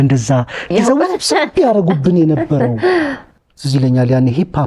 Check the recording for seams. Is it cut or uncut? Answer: cut